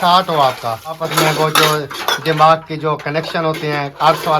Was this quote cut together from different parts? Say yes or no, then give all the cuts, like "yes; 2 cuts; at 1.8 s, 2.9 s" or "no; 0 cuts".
yes; 1 cut; at 1.0 s